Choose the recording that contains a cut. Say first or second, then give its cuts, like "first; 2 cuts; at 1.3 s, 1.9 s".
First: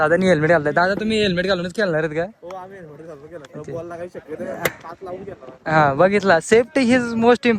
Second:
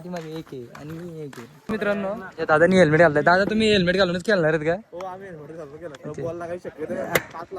second; 1 cut; at 1.6 s